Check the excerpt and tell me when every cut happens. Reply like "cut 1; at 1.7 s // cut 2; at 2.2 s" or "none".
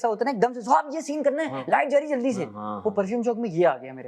none